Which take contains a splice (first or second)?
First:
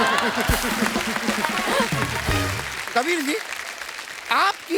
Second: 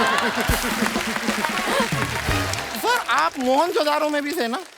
second